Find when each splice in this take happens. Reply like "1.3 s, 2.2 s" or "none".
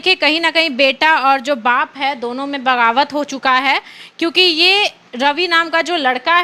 none